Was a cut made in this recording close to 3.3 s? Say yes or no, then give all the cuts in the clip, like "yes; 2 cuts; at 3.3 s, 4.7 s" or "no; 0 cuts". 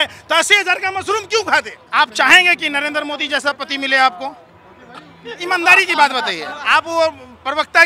no; 2 cuts; at 1.8 s, 6.5 s